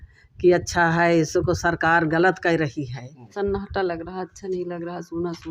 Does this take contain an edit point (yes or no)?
yes